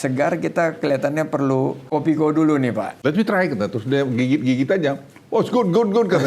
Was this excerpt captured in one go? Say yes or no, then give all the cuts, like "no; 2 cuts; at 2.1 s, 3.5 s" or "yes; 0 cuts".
no; 2 cuts; at 1.8 s, 2.9 s